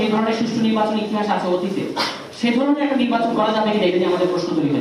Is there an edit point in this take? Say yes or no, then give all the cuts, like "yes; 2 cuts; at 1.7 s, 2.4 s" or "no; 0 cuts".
no; 0 cuts